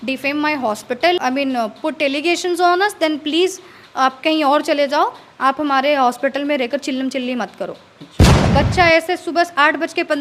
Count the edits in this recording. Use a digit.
2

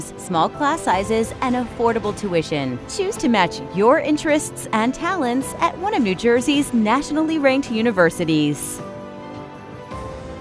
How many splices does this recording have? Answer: 1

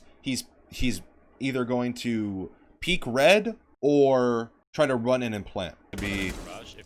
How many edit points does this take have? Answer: 3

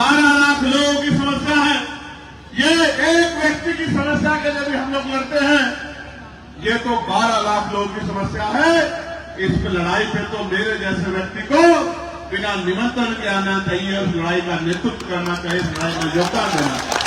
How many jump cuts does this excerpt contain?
0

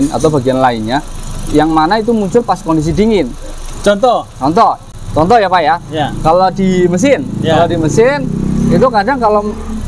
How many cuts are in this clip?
0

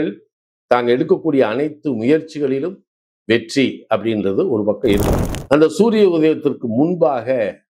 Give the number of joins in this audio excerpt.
1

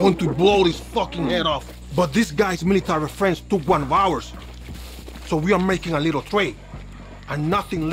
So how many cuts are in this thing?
1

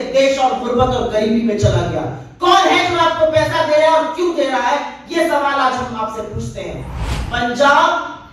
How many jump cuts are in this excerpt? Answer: 1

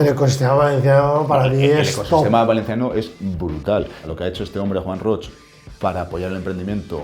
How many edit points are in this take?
1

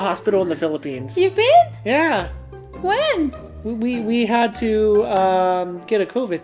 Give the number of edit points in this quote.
0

